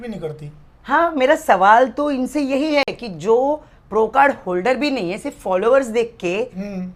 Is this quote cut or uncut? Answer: uncut